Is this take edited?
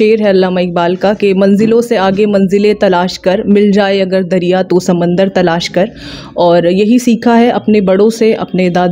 no; 0 cuts

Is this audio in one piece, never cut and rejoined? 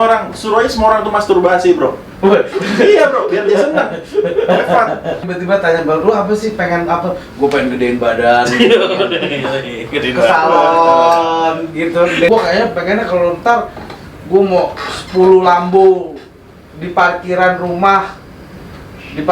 no; 2 cuts; at 5.2 s, 12.3 s

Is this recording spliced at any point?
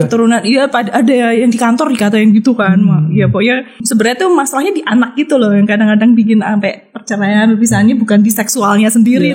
yes; 1 cut; at 3.8 s

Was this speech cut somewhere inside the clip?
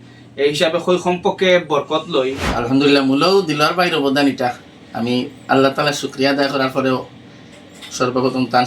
yes; 1 cut; at 2.6 s

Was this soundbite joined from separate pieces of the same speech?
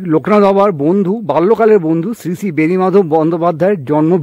no; 0 cuts

